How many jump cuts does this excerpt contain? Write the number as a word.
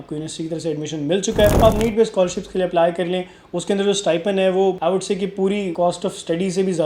three